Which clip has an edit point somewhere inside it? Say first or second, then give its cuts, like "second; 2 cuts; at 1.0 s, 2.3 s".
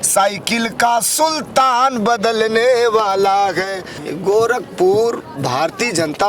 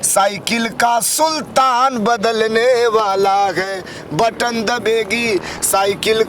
first; 1 cut; at 4.0 s